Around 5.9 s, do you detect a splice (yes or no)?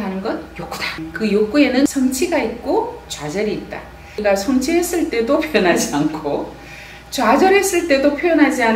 no